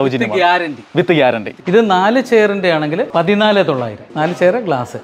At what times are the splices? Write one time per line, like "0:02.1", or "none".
0:01.5
0:03.1
0:04.0